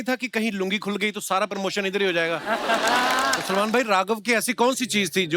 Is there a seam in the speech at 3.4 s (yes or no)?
yes